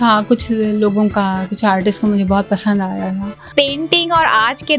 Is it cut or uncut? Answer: cut